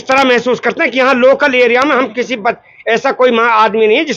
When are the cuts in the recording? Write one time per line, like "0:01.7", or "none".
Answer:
none